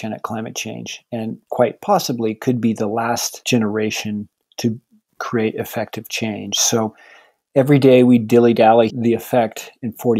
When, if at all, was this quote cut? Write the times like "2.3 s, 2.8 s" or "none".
3.3 s, 8.9 s